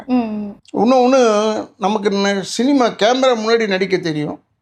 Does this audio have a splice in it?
no; 0 cuts

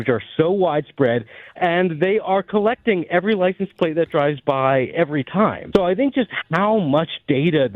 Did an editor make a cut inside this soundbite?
yes; 2 cuts; at 1.4 s, 5.6 s

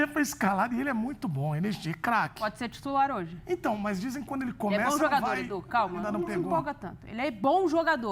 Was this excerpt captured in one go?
yes; 0 cuts

